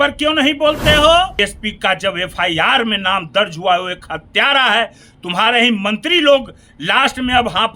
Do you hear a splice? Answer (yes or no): yes